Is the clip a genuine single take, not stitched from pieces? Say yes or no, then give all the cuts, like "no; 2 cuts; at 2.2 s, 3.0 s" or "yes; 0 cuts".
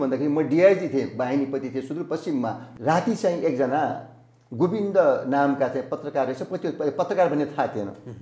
no; 1 cut; at 2.7 s